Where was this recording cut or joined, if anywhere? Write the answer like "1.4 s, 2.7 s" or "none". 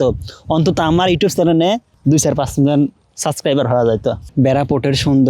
4.2 s